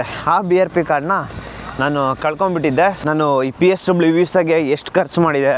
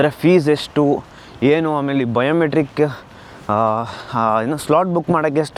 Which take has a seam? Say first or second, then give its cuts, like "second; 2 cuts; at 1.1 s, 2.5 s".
first; 1 cut; at 3.0 s